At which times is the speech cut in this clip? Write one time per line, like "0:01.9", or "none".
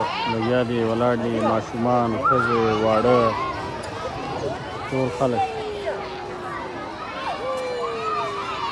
none